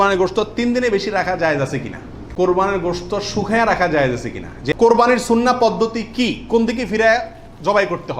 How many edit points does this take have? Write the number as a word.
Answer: two